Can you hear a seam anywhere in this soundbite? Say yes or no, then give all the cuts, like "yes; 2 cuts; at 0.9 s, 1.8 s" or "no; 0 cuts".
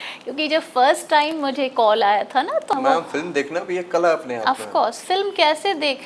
yes; 1 cut; at 2.7 s